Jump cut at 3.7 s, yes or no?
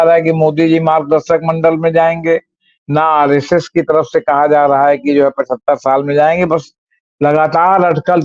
no